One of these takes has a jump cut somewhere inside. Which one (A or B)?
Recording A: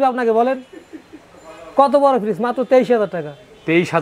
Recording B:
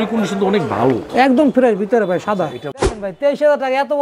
B